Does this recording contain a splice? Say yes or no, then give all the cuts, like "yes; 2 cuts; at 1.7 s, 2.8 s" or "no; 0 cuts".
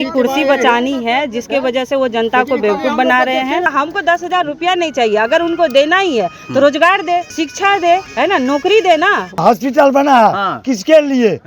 yes; 4 cuts; at 3.7 s, 7.3 s, 8.1 s, 9.4 s